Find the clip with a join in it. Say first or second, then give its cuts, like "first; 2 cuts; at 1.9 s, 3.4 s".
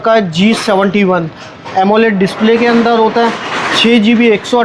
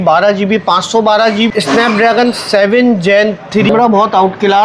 second; 2 cuts; at 1.5 s, 3.7 s